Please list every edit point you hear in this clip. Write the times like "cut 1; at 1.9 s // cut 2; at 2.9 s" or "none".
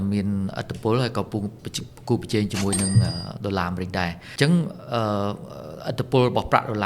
cut 1; at 4.2 s